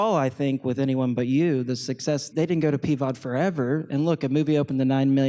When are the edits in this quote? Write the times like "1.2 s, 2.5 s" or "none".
2.3 s